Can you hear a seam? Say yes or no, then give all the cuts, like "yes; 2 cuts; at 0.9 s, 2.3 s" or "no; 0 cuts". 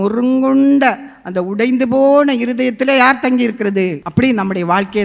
yes; 1 cut; at 4.0 s